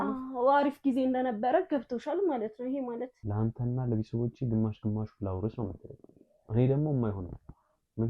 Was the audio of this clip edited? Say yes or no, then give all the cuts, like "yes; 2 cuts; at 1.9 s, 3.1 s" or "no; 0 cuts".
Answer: yes; 1 cut; at 3.2 s